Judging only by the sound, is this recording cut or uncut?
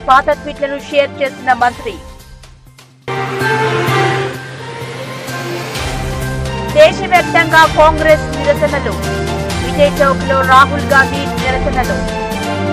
uncut